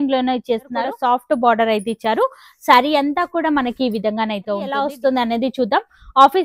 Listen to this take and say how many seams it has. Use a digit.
2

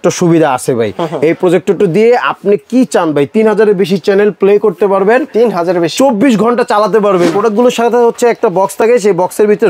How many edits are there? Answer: 1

